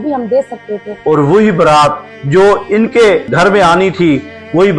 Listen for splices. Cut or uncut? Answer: cut